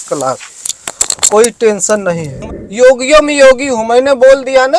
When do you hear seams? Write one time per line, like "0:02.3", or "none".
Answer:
0:02.3